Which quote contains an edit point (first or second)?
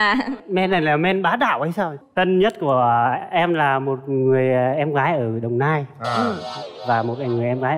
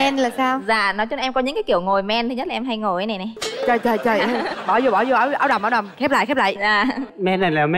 first